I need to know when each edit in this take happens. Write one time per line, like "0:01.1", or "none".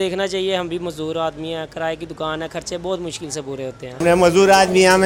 none